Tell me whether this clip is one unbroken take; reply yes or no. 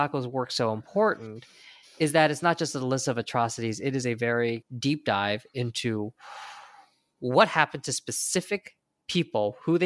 yes